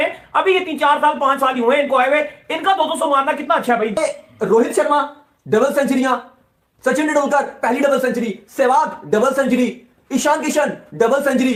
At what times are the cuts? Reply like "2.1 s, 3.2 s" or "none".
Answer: none